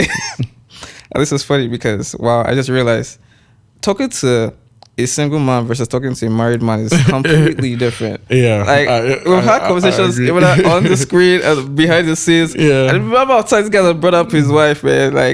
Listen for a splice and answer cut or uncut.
uncut